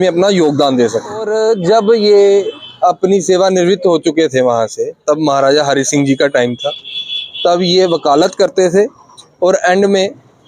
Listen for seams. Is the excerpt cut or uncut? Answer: cut